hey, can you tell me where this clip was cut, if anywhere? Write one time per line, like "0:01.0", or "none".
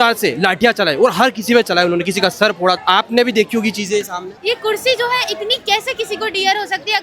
0:04.3